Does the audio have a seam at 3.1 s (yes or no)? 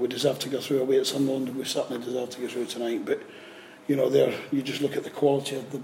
no